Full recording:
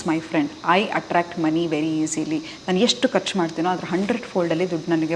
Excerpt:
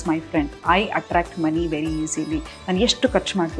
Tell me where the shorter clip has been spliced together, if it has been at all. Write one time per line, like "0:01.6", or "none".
none